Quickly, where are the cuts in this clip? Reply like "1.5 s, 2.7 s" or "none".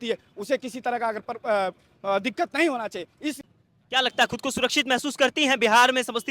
3.4 s